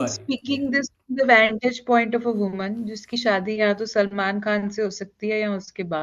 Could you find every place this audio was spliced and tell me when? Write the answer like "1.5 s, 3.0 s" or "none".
none